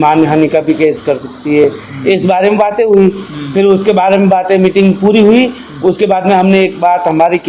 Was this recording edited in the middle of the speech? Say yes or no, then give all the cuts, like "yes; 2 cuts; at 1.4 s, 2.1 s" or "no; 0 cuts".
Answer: no; 0 cuts